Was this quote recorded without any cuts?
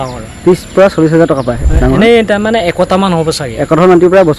no; 1 cut; at 1.6 s

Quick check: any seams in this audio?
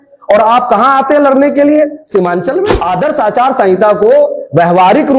yes; 1 cut; at 2.8 s

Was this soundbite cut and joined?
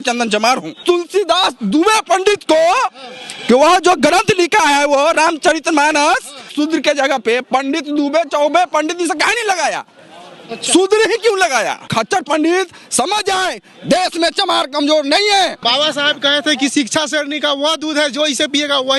yes; 4 cuts; at 0.8 s, 6.5 s, 11.9 s, 15.6 s

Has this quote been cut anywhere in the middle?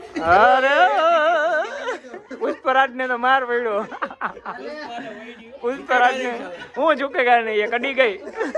no; 0 cuts

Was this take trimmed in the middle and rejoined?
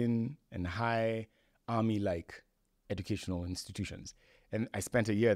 no; 0 cuts

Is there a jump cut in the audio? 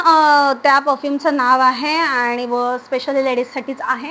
no; 0 cuts

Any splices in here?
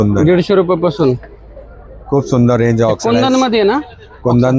no; 0 cuts

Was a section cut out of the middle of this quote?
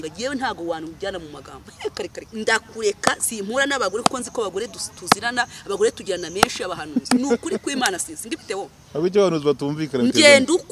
yes; 1 cut; at 2.2 s

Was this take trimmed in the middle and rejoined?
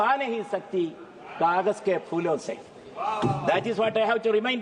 no; 0 cuts

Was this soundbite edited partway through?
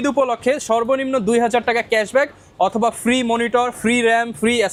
no; 0 cuts

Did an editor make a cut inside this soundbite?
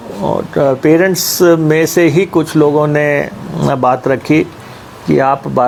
no; 0 cuts

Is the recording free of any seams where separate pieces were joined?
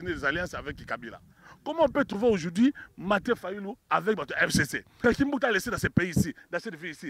no; 1 cut; at 5.0 s

